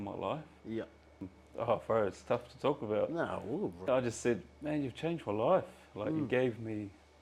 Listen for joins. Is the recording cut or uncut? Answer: cut